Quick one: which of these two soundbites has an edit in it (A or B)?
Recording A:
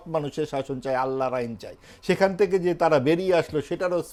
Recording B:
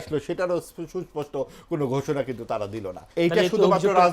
B